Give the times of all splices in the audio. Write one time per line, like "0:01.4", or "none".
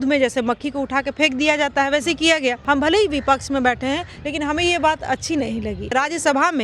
0:02.6
0:05.9

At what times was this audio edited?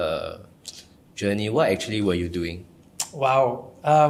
none

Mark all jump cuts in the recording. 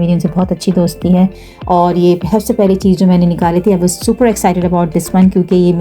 0:01.5

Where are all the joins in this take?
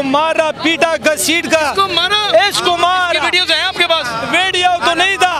none

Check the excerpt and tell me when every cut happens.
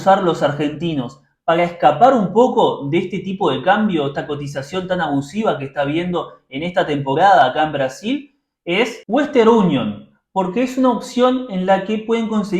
none

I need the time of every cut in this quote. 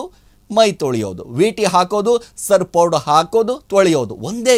none

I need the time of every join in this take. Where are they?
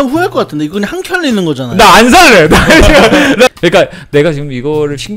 0:03.5

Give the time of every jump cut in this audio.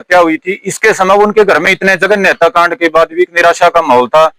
0:01.6

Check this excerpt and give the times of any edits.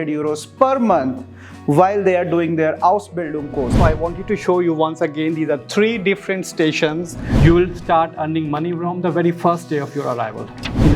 0:03.8
0:07.2

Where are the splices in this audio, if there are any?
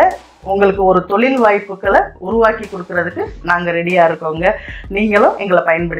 none

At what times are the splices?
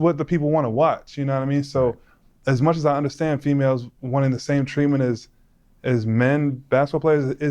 0:06.6

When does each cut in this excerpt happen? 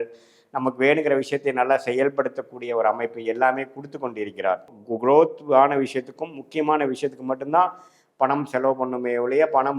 0:04.8

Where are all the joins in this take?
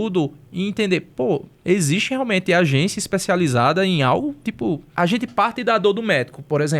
0:01.5
0:04.9

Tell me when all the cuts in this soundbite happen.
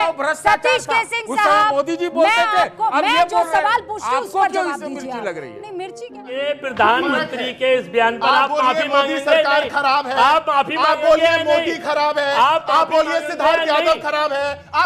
0:05.9
0:13.9

